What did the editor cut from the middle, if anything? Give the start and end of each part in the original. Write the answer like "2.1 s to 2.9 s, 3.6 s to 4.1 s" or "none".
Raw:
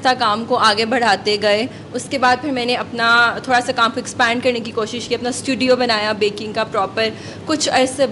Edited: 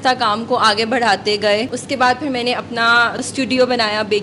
1.8 s to 2.0 s, 3.4 s to 5.3 s